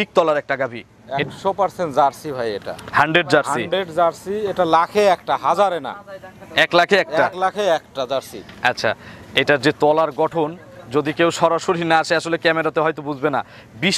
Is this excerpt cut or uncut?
uncut